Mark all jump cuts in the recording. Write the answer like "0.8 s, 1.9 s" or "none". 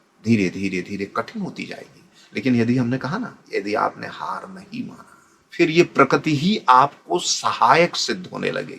5.4 s